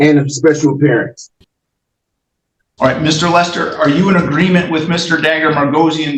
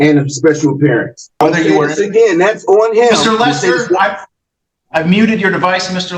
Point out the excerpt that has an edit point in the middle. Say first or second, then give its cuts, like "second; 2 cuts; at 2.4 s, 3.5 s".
second; 1 cut; at 1.4 s